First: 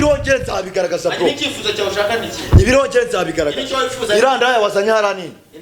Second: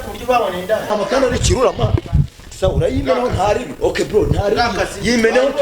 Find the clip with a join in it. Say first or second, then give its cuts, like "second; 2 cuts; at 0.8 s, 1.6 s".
second; 1 cut; at 0.9 s